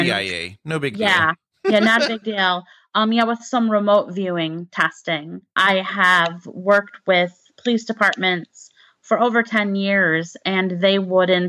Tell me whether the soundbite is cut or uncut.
cut